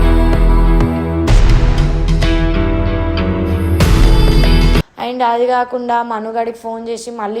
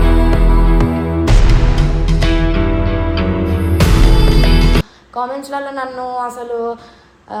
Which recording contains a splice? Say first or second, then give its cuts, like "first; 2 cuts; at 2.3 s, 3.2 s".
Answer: first; 1 cut; at 4.9 s